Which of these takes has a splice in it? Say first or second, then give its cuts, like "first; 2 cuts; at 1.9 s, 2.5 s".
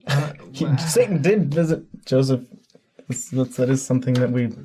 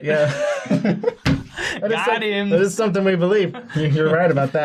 second; 1 cut; at 2.5 s